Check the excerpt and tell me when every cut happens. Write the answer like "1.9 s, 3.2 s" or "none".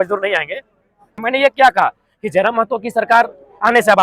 1.2 s